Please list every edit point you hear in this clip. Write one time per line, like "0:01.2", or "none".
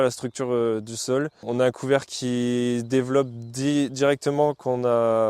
0:01.5